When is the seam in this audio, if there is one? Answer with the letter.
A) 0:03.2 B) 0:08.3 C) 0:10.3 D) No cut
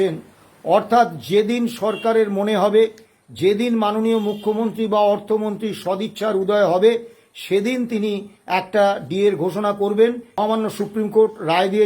C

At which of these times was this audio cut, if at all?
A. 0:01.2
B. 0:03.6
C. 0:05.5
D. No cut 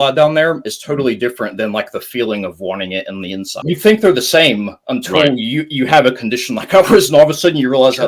B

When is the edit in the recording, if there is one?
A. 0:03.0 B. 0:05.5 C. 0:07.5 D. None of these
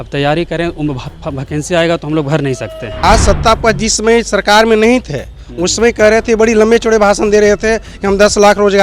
A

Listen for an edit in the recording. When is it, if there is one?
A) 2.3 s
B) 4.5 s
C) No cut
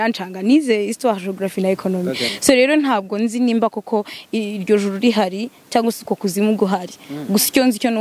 A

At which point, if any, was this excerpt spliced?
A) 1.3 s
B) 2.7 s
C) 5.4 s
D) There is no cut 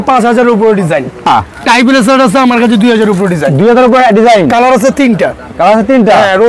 A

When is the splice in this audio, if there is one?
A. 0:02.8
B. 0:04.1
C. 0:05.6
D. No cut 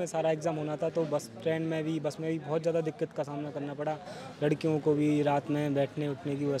D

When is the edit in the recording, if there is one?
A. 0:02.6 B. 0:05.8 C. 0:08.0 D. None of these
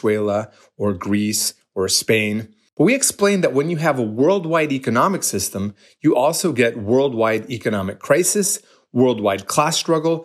A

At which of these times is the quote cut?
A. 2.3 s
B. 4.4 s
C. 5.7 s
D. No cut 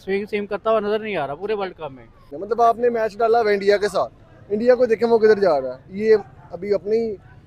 A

